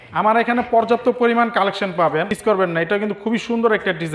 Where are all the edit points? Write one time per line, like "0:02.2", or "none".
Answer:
0:02.3

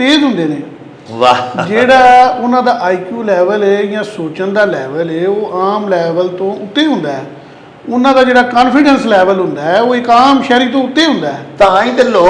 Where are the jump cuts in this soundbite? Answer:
none

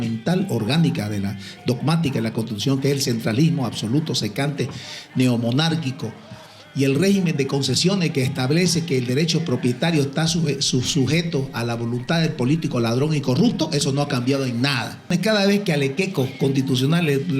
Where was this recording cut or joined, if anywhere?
0:15.1

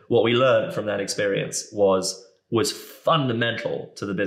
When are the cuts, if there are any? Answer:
none

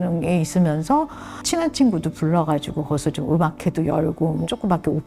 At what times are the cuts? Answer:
0:01.4

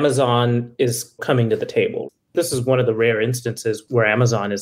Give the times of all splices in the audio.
0:02.2

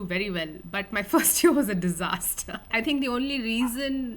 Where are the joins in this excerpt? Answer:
none

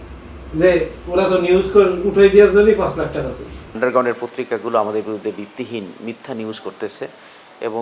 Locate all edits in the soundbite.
0:03.8

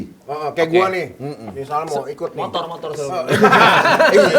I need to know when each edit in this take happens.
none

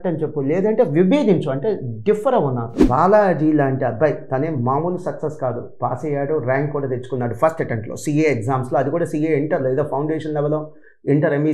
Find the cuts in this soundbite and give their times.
0:02.8

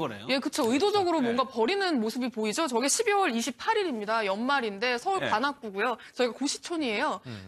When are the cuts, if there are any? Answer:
0:02.5

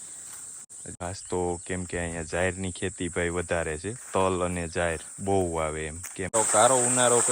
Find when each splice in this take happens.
0:00.9
0:06.3

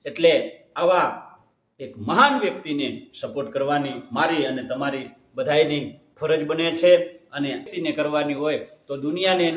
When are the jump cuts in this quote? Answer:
0:07.7

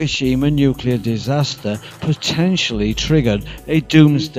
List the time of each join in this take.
0:03.2

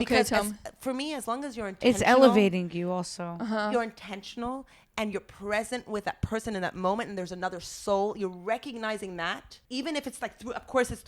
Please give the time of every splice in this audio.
0:09.5

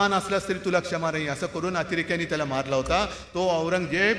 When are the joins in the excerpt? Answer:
none

